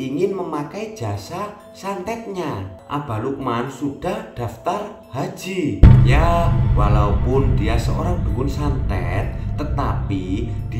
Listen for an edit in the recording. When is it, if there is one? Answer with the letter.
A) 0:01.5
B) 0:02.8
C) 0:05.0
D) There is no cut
B